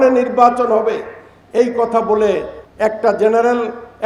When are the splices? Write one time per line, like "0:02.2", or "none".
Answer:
0:02.6